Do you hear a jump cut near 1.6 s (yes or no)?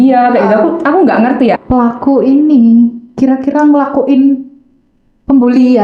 yes